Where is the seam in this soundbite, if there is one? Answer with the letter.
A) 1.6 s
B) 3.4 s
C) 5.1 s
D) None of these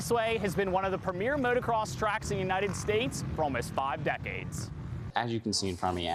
C